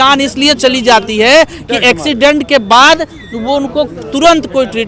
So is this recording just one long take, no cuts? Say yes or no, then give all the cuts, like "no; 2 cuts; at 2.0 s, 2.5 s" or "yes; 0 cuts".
yes; 0 cuts